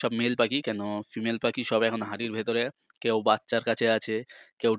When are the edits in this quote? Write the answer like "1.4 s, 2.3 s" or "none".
none